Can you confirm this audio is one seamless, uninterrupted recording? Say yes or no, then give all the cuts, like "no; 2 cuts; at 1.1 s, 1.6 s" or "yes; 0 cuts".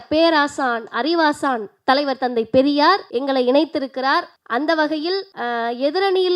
no; 3 cuts; at 3.1 s, 4.4 s, 5.3 s